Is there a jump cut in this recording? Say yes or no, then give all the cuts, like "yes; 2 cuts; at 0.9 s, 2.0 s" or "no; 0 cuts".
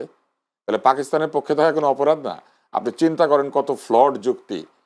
no; 0 cuts